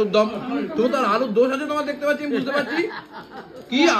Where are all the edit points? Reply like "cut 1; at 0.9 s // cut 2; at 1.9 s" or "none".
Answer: none